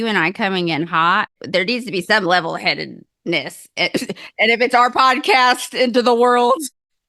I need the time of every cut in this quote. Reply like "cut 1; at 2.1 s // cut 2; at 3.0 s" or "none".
cut 1; at 1.4 s